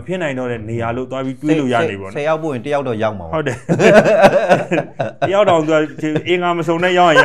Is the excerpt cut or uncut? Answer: uncut